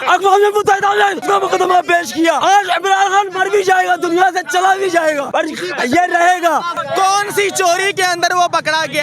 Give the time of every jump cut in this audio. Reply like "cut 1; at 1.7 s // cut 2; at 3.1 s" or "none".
cut 1; at 1.2 s // cut 2; at 2.4 s // cut 3; at 5.2 s // cut 4; at 6.8 s